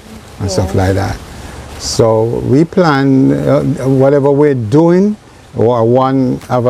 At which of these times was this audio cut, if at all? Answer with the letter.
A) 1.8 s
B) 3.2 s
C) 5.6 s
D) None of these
D